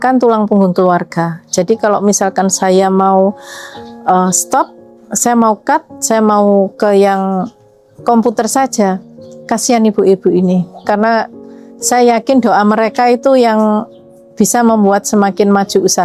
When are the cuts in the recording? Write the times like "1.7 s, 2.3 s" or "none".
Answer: none